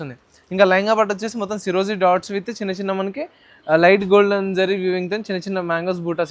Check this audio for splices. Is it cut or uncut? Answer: uncut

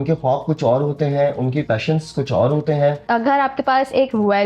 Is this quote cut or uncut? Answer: cut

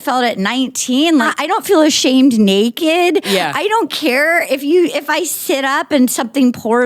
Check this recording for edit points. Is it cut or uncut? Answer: cut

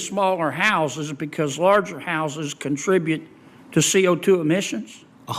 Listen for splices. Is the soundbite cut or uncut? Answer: uncut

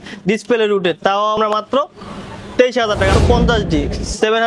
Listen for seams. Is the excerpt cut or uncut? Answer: cut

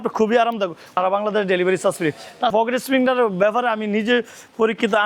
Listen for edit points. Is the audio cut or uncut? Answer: cut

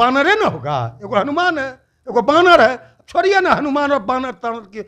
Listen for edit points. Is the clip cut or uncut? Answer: uncut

